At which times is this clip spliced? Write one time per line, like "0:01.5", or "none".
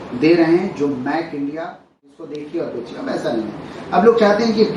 0:02.2